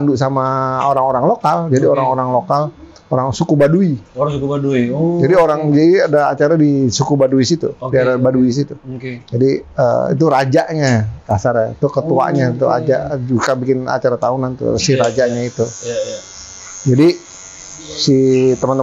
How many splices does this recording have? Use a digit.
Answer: 0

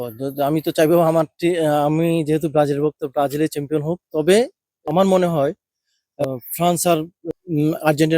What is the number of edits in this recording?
3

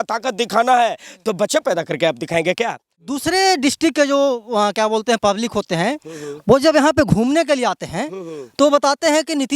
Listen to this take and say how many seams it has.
1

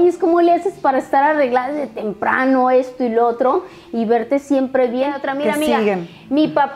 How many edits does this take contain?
1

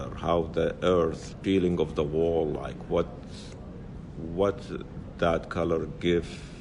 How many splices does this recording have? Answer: 0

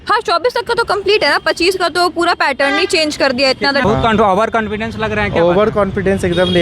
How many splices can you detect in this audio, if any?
1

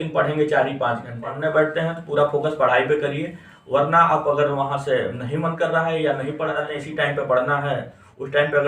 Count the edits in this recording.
2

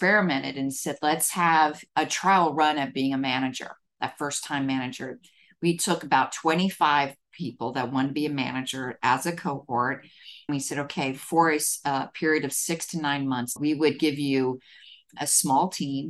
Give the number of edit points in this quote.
4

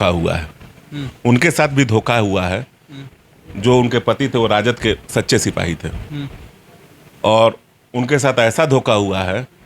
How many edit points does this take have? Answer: 0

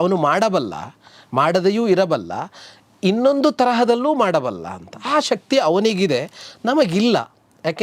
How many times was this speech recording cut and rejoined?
0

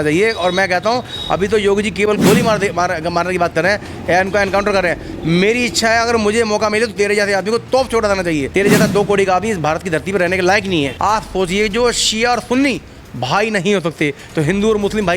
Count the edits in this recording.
2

